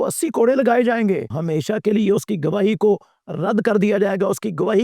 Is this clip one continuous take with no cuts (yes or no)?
no